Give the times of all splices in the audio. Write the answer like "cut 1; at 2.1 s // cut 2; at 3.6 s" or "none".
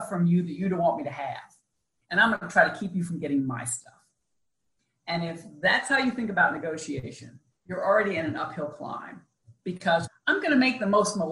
cut 1; at 7.7 s // cut 2; at 10.1 s